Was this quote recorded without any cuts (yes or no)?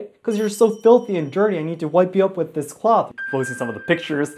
no